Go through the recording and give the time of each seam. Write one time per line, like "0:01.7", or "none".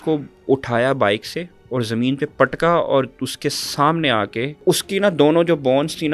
0:01.5
0:04.6